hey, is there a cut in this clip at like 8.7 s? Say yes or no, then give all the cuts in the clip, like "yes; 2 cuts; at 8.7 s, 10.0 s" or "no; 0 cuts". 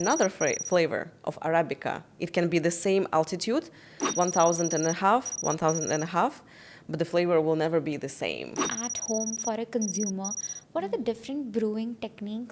yes; 1 cut; at 8.7 s